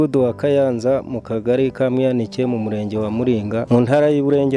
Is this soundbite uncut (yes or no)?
no